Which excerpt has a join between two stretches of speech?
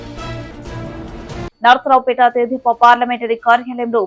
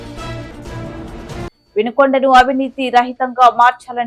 first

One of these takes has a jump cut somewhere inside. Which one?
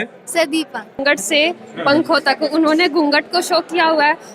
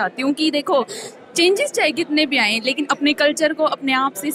first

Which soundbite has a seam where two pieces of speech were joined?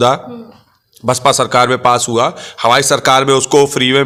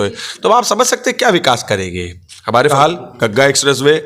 second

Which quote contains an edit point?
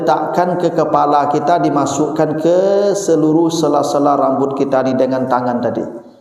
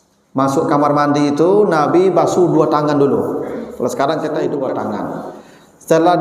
second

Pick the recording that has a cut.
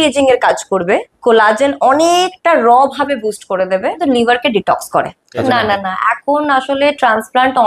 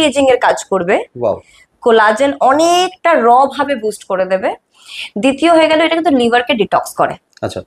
first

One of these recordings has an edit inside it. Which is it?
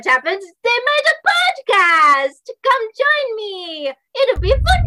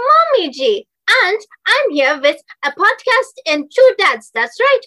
second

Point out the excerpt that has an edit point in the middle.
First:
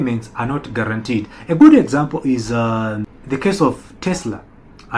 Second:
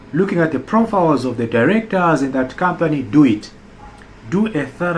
first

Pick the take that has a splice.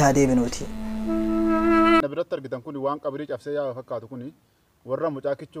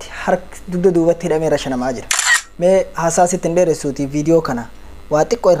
first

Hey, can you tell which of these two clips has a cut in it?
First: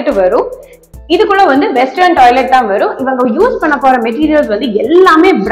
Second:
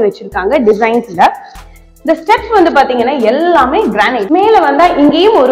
second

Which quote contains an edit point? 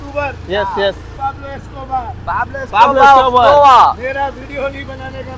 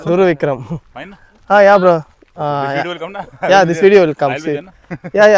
first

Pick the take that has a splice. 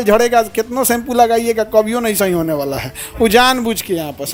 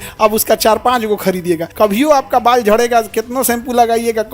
second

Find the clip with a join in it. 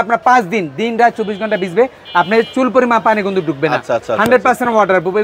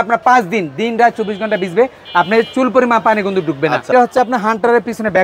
second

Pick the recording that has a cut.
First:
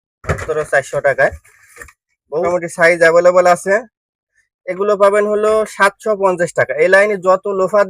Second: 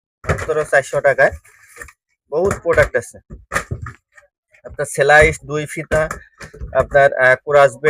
first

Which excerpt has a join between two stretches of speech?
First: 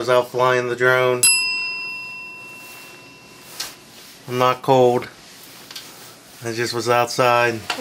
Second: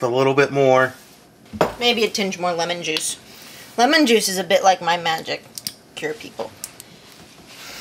second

